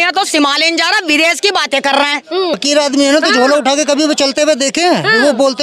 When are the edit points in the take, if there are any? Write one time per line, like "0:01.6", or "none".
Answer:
0:02.6